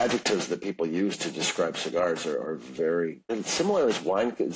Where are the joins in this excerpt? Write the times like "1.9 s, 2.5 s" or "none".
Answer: 3.2 s